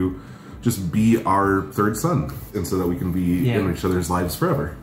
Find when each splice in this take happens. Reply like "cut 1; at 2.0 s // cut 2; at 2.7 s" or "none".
cut 1; at 2.5 s